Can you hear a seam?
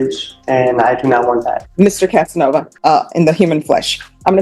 yes; 2 cuts; at 1.6 s, 2.7 s

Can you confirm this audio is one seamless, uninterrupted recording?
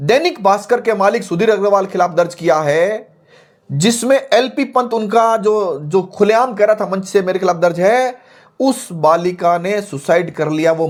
yes; 0 cuts

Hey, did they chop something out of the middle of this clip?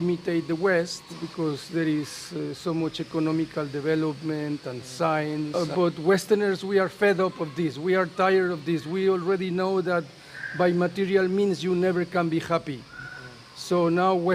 yes; 2 cuts; at 1.2 s, 5.5 s

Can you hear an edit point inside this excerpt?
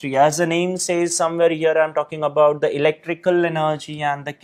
no; 0 cuts

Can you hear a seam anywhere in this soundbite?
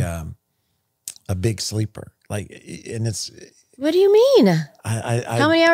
no; 0 cuts

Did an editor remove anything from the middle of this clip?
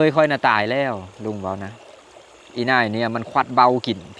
no; 0 cuts

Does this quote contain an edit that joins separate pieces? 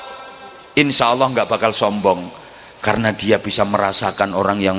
no; 0 cuts

